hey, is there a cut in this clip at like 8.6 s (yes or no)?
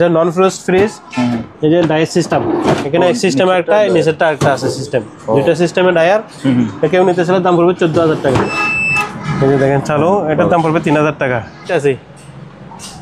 yes